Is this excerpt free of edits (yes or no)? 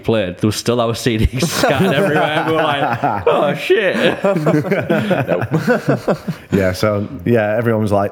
yes